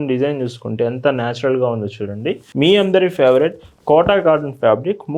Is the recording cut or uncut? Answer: cut